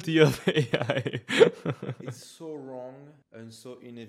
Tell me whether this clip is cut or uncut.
cut